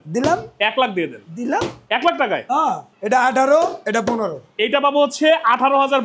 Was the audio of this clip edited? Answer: yes; 2 cuts; at 2.9 s, 4.5 s

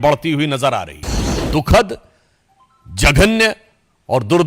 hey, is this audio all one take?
no; 1 cut; at 1.3 s

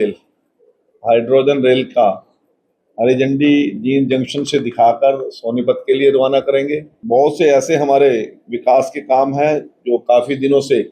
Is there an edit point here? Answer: yes; 1 cut; at 6.9 s

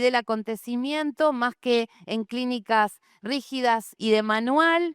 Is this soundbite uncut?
no; 1 cut; at 4.0 s

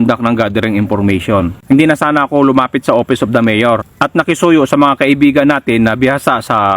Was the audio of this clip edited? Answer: yes; 1 cut; at 3.9 s

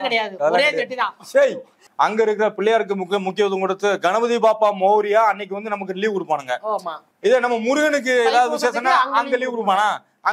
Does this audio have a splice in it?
yes; 2 cuts; at 1.8 s, 7.0 s

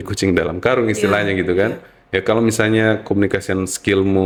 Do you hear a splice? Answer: no; 0 cuts

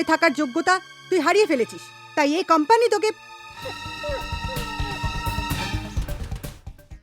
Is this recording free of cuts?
yes; 0 cuts

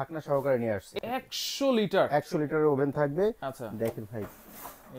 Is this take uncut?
no; 1 cut; at 0.9 s

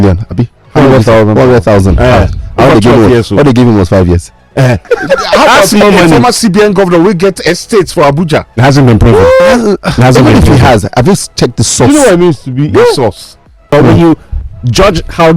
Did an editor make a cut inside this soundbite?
yes; 2 cuts; at 4.8 s, 13.7 s

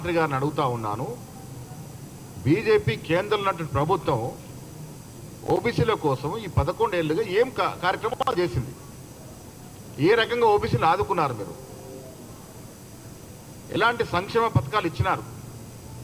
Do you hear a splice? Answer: no; 0 cuts

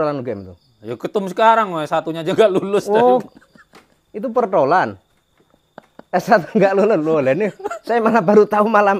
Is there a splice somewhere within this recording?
no; 0 cuts

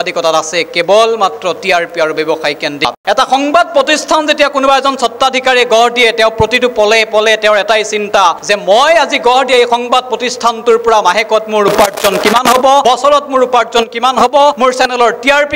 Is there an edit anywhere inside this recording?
no; 0 cuts

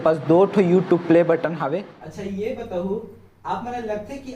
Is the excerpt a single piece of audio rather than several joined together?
no; 1 cut; at 1.8 s

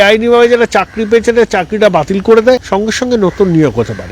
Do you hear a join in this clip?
yes; 1 cut; at 2.6 s

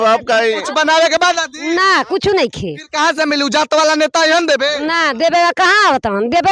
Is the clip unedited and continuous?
yes; 0 cuts

